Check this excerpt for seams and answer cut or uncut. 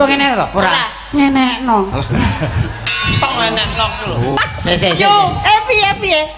cut